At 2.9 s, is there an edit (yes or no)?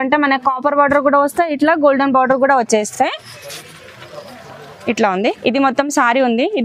no